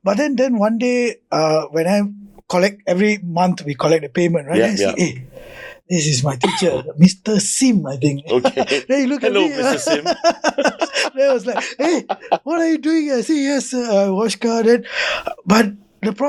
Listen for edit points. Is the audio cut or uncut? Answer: uncut